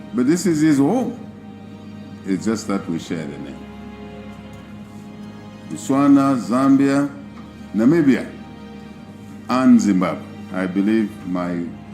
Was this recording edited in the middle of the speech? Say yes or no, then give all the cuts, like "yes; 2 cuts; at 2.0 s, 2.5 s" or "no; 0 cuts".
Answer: yes; 1 cut; at 4.6 s